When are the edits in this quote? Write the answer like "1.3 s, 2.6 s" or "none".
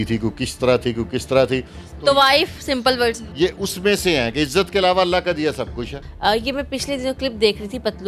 3.2 s, 6.0 s